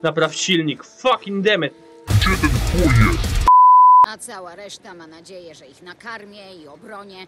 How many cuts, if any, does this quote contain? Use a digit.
1